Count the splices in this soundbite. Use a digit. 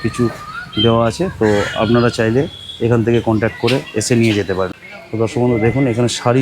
1